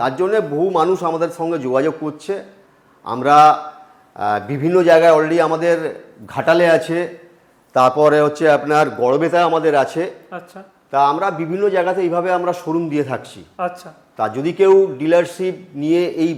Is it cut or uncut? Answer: uncut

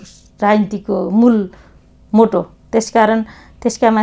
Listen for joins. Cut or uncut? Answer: uncut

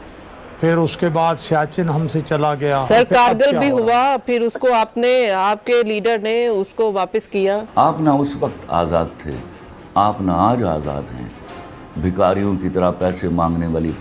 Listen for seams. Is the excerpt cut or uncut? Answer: cut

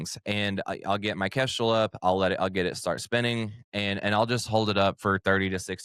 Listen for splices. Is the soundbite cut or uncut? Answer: uncut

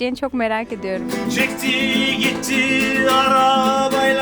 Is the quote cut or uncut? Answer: cut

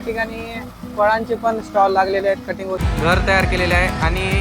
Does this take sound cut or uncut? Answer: cut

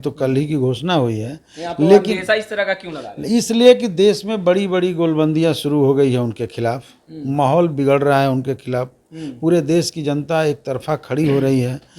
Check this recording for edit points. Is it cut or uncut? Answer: uncut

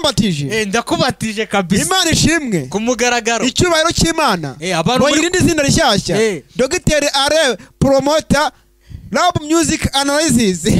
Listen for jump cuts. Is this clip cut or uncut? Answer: uncut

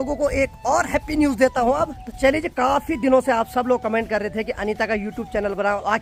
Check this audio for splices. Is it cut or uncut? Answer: uncut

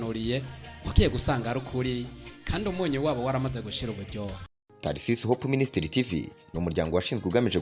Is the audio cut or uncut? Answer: cut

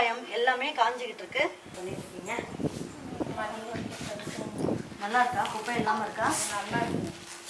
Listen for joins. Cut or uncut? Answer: cut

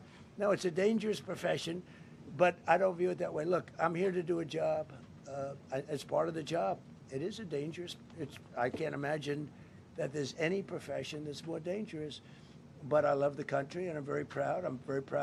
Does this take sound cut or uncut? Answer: uncut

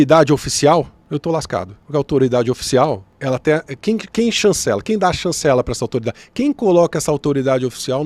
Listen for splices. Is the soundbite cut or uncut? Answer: cut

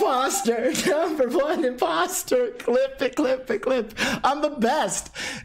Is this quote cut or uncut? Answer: uncut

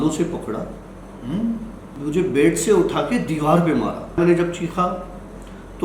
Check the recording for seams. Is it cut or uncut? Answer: cut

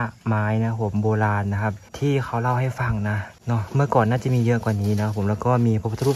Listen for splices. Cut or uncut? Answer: cut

